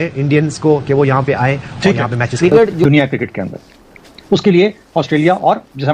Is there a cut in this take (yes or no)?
yes